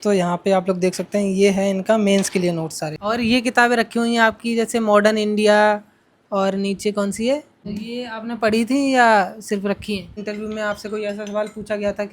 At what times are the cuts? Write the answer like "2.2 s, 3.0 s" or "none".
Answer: 2.9 s, 7.6 s, 10.2 s